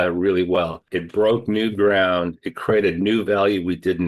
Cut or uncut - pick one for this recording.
cut